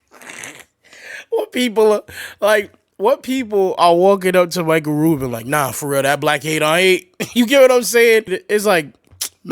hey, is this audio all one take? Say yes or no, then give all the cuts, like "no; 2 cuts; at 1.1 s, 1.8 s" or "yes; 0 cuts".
no; 1 cut; at 8.4 s